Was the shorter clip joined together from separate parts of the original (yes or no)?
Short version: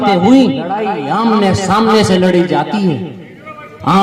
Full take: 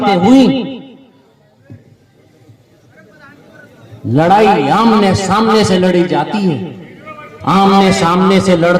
yes